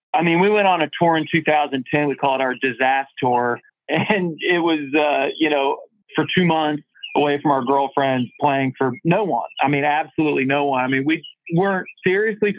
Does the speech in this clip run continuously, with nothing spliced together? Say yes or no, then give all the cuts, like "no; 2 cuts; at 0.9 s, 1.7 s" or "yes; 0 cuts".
yes; 0 cuts